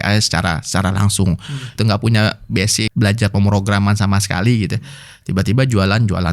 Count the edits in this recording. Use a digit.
2